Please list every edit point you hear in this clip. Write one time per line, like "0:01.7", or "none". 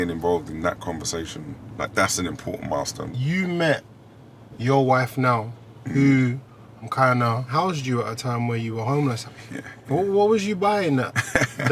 0:01.6
0:03.0
0:07.5
0:09.2